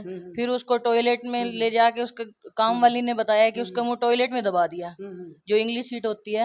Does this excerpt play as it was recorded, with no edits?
yes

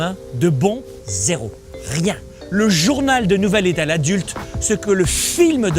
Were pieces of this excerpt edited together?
yes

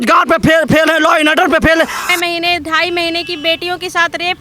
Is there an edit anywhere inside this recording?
yes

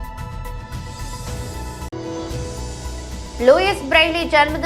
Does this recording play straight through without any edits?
no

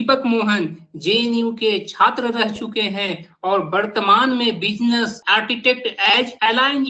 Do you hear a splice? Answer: no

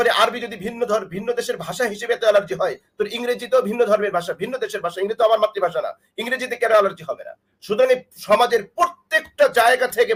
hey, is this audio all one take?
yes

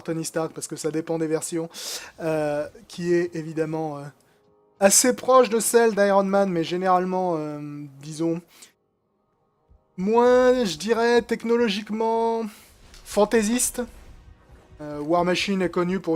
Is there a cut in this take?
no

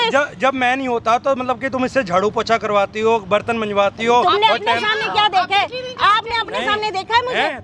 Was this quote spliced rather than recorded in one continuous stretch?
no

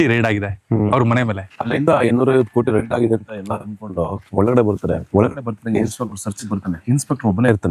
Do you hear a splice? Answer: yes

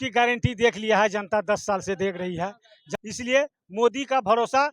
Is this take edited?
yes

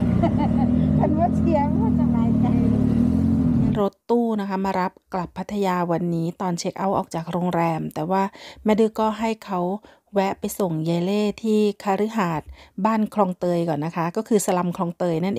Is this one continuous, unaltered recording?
no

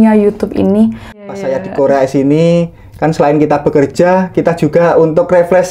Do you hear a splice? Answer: yes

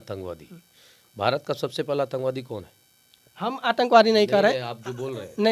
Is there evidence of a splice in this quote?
no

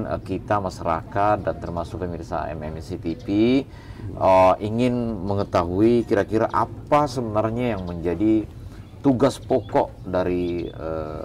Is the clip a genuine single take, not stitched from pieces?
yes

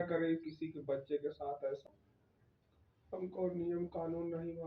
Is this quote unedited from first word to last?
no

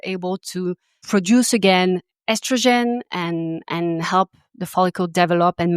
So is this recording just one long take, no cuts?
no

